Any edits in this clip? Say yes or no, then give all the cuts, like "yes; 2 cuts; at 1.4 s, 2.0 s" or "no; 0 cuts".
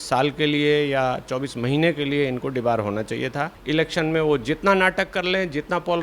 yes; 1 cut; at 3.5 s